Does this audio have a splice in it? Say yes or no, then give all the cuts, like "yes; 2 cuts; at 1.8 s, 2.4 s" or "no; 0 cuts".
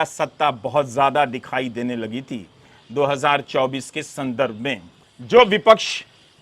yes; 1 cut; at 5.1 s